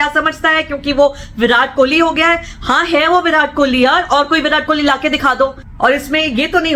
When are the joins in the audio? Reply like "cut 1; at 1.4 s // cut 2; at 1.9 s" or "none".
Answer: cut 1; at 5.6 s